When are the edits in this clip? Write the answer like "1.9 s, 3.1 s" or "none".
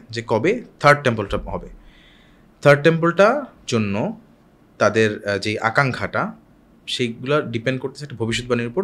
none